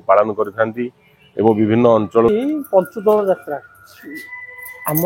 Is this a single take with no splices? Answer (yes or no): no